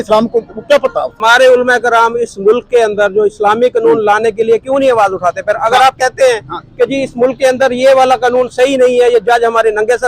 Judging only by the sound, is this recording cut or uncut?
uncut